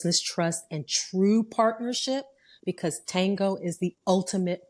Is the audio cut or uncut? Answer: uncut